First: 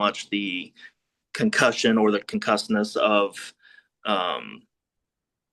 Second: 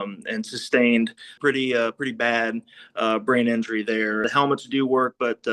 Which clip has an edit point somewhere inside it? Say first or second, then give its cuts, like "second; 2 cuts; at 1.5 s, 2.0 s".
second; 2 cuts; at 1.4 s, 4.3 s